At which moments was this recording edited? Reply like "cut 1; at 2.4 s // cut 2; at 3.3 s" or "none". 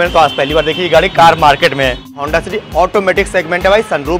cut 1; at 2.1 s